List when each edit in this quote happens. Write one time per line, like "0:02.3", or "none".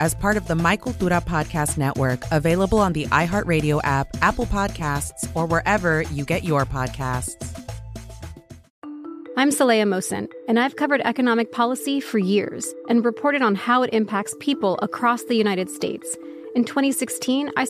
0:08.6

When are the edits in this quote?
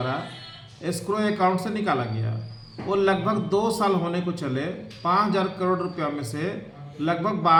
none

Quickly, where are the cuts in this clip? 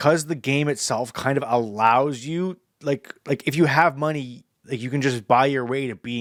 none

